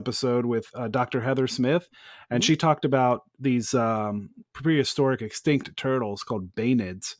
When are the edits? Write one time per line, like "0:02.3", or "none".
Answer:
none